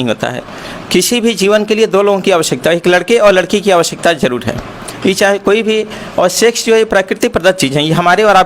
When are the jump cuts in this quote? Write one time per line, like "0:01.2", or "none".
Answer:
none